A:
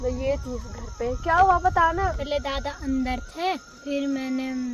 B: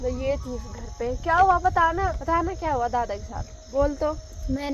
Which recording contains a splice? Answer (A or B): A